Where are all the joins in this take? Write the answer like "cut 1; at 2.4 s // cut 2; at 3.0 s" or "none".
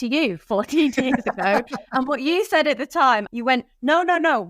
cut 1; at 3.3 s